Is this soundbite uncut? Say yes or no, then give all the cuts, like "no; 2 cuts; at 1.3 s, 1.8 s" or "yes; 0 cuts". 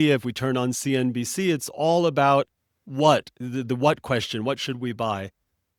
yes; 0 cuts